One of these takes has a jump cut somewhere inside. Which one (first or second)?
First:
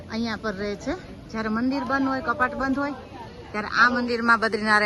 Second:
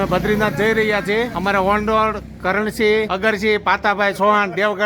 second